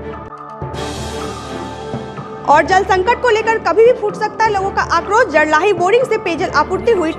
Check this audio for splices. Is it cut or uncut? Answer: cut